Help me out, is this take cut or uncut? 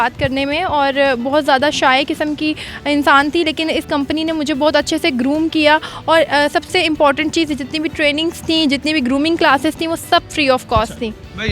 uncut